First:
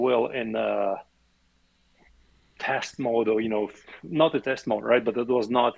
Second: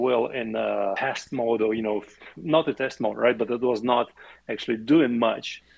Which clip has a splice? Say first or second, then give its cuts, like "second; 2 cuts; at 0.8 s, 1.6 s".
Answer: second; 1 cut; at 1.0 s